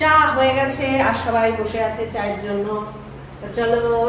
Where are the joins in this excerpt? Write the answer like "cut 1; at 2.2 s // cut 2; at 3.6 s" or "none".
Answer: none

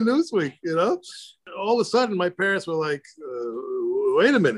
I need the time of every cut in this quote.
cut 1; at 1.5 s

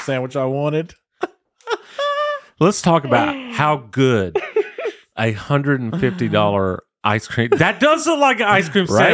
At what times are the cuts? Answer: none

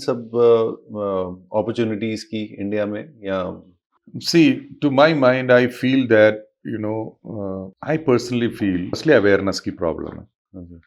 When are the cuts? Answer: cut 1; at 7.7 s // cut 2; at 9.0 s

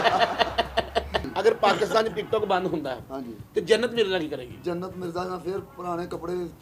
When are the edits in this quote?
cut 1; at 1.3 s

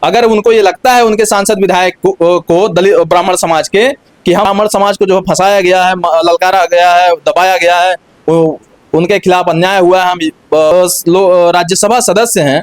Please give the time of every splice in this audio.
cut 1; at 4.5 s // cut 2; at 10.7 s

